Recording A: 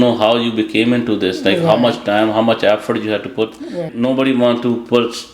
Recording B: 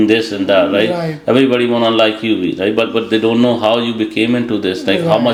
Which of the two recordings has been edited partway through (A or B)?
A